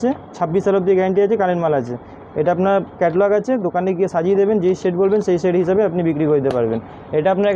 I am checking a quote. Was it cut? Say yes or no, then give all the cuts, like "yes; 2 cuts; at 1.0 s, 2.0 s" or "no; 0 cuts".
no; 0 cuts